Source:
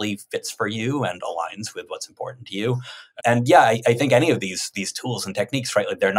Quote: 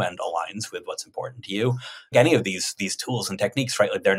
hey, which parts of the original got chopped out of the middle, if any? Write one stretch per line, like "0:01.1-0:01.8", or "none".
0:03.1-0:04.1